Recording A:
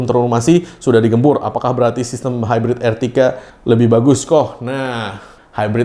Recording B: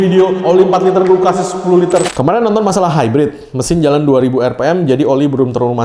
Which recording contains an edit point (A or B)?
B